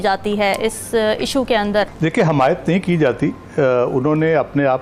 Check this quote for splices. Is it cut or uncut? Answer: cut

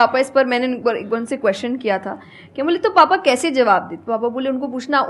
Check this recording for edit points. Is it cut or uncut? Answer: uncut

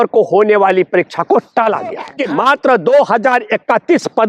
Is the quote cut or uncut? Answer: cut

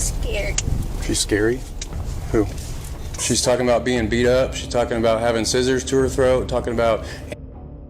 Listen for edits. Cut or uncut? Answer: cut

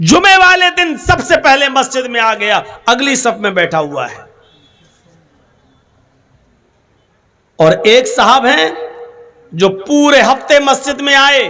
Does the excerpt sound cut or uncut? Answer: uncut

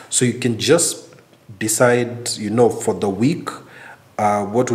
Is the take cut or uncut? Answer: uncut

